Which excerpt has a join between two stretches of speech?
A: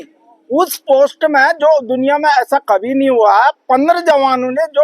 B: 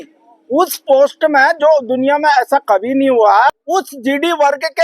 B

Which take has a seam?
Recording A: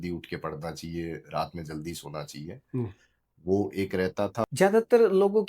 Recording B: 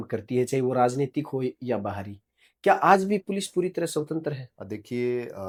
A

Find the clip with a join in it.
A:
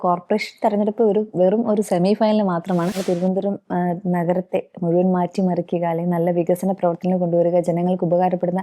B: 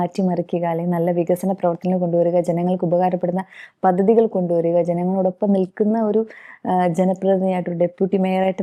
A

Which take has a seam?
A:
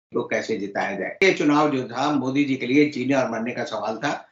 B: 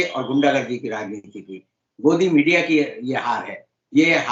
A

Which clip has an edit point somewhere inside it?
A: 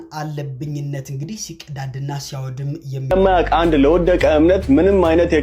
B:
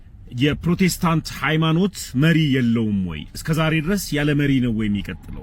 A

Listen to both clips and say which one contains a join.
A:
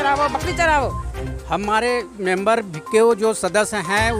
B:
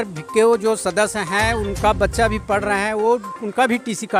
A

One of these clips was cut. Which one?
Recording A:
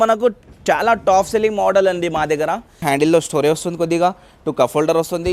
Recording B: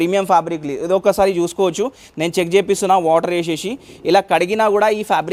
A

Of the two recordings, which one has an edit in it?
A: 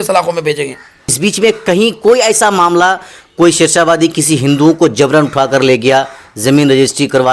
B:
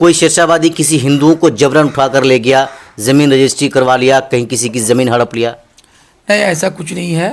A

